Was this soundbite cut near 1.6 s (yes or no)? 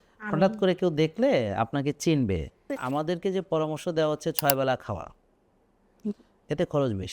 no